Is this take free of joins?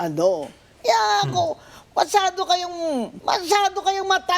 no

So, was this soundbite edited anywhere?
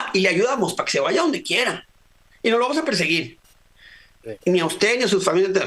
no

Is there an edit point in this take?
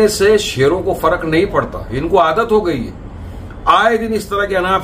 no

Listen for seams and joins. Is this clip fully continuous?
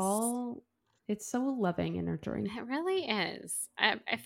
no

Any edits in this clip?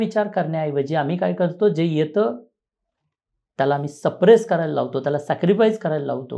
no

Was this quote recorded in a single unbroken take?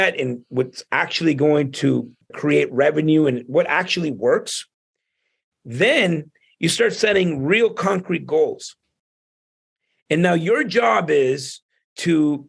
no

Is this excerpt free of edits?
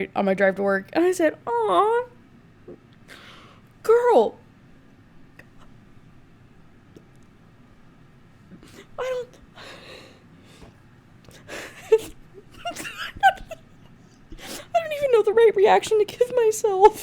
yes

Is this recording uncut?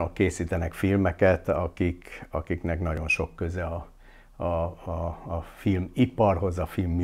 yes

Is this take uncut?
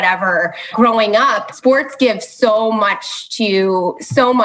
no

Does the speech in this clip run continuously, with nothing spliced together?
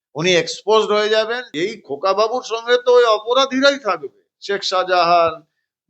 no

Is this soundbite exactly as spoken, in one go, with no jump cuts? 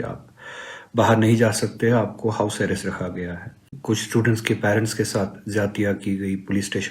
no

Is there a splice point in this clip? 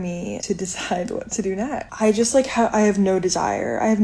yes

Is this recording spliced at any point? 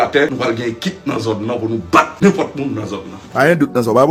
no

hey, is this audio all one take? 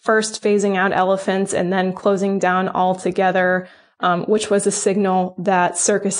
yes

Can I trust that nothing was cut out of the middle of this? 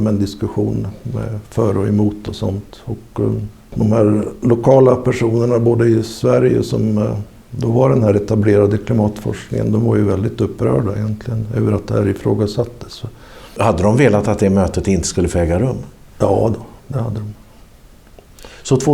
no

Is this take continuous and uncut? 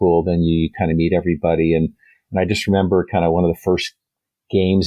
yes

